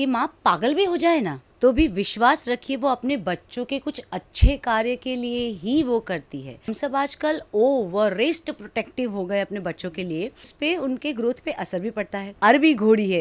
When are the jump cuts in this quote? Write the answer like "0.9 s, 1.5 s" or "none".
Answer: 1.4 s, 6.7 s, 10.5 s, 12.2 s